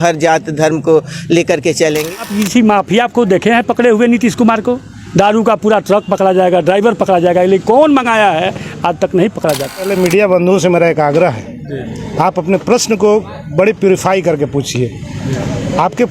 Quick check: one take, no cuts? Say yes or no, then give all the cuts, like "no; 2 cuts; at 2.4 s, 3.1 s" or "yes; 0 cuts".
no; 2 cuts; at 2.1 s, 9.8 s